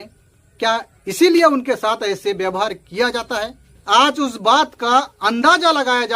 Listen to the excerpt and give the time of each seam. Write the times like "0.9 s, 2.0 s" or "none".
3.7 s